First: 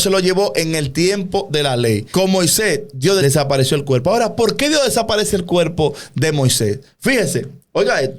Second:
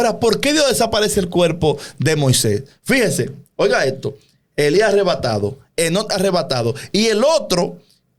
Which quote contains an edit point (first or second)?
first